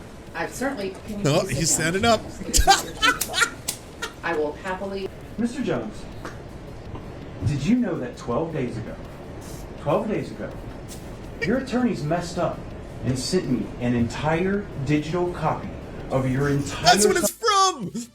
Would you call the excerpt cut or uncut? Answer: cut